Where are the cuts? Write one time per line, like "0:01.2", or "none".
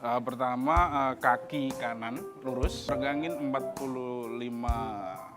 0:02.9